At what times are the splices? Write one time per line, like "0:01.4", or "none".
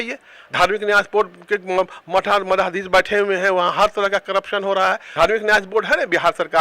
0:05.0